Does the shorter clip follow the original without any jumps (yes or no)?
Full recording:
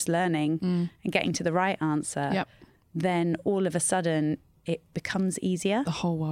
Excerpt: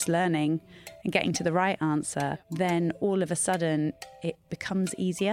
no